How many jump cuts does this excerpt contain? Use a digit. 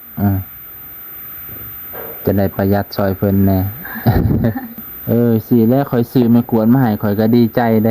1